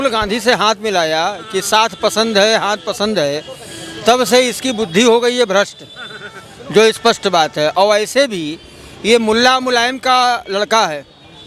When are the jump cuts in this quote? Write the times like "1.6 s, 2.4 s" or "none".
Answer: none

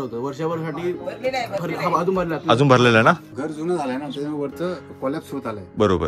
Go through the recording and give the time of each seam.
3.3 s

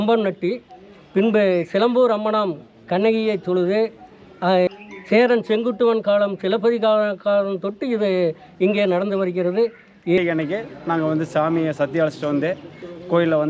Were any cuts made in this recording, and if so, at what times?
4.7 s, 10.2 s

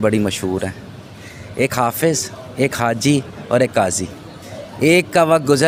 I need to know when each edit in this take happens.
none

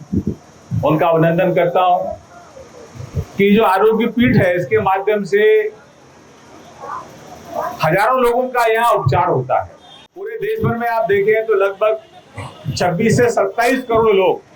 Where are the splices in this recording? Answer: 10.4 s

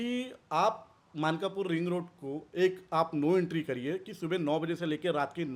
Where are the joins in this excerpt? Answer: none

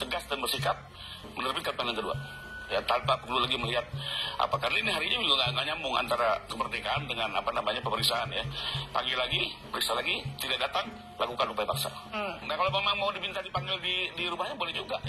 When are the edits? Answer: 12.4 s

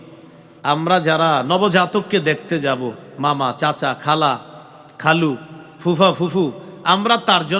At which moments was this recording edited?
none

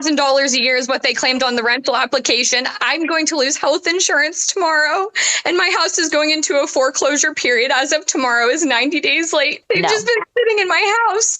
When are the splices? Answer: 9.6 s

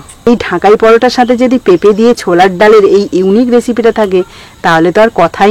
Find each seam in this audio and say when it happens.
none

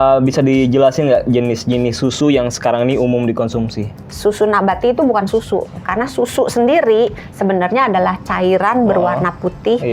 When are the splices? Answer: 4.0 s

